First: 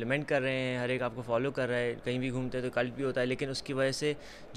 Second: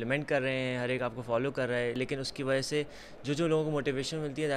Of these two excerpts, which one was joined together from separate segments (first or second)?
second